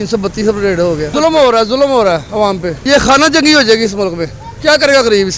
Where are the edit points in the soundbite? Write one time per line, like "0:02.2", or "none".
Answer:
none